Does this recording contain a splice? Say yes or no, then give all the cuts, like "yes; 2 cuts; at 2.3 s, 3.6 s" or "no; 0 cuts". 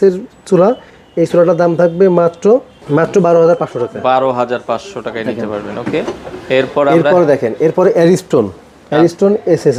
no; 0 cuts